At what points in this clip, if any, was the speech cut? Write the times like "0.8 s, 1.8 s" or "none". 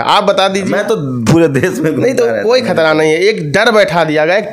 none